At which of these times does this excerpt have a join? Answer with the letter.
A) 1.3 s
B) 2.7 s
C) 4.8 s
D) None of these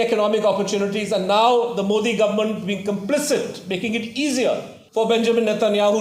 C